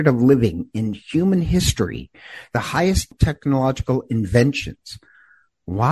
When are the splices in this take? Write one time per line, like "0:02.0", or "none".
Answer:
0:03.1